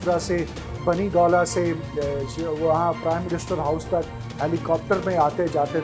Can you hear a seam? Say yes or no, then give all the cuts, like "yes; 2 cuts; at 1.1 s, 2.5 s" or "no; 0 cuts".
no; 0 cuts